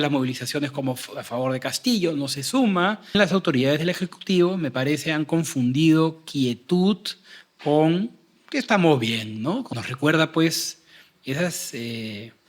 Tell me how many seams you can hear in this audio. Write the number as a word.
two